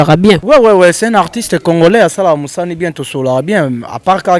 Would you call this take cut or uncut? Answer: uncut